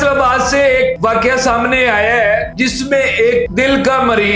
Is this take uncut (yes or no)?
no